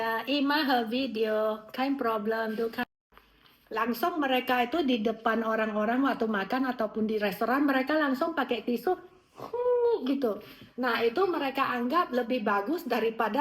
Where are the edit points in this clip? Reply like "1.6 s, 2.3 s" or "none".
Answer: 2.9 s